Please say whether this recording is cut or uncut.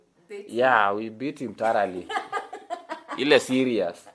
uncut